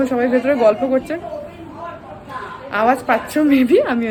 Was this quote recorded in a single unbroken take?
yes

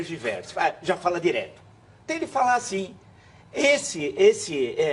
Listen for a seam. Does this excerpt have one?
no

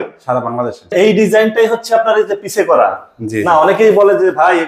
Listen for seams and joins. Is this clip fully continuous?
no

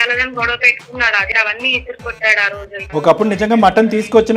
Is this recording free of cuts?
no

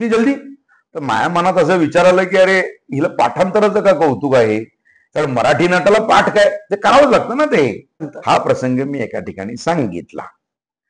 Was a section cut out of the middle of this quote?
yes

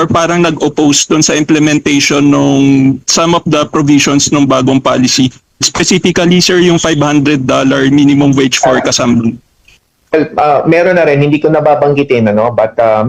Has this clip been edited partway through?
no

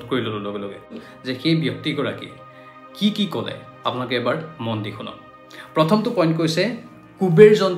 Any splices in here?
yes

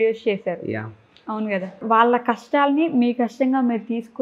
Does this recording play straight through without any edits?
no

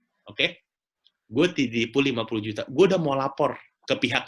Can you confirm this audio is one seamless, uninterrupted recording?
yes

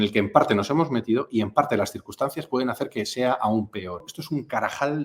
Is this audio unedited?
no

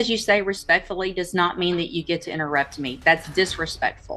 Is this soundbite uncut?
yes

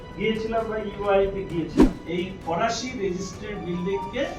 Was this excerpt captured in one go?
no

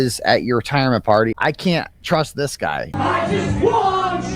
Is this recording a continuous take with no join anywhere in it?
no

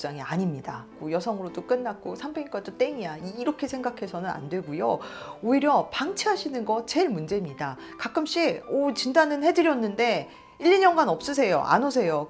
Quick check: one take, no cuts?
no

